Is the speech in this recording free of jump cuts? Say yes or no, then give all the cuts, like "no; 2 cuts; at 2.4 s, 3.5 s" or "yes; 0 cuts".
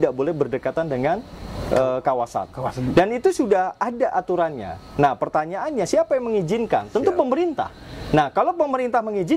yes; 0 cuts